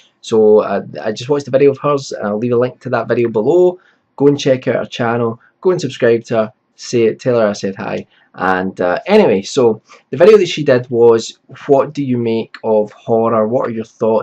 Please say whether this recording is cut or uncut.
cut